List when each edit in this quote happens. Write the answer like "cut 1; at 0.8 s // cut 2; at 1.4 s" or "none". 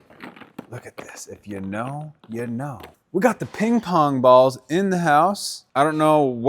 cut 1; at 2.9 s // cut 2; at 5.5 s

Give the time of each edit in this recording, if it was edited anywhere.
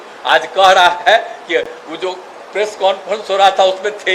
none

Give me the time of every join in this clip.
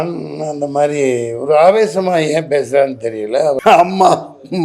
cut 1; at 3.6 s

